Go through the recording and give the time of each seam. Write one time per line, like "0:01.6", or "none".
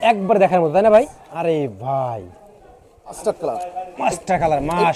0:01.2
0:03.2